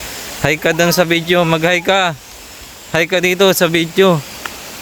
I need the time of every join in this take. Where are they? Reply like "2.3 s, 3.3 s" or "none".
none